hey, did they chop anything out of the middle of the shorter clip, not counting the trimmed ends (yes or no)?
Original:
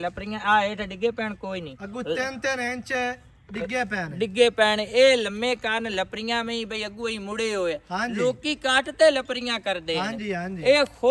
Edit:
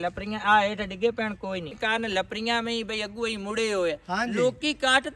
yes